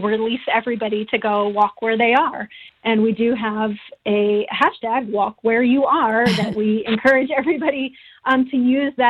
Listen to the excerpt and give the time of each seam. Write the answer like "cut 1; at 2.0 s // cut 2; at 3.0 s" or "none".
none